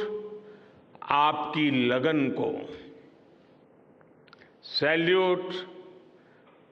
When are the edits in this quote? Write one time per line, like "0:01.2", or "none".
none